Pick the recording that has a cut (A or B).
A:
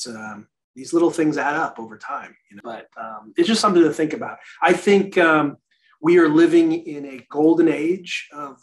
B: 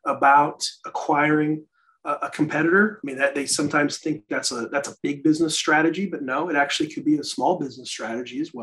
A